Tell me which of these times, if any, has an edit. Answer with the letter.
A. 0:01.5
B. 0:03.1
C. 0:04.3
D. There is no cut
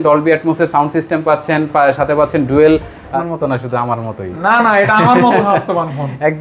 B